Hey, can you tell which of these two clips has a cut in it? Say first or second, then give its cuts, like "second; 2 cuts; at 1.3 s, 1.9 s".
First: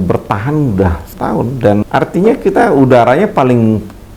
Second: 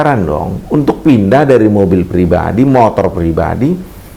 first; 1 cut; at 1.9 s